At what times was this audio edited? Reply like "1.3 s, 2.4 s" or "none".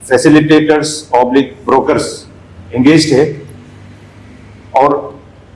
none